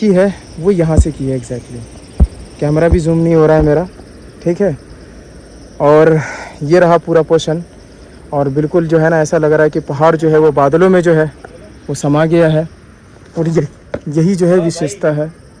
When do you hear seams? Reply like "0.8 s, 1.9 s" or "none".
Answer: none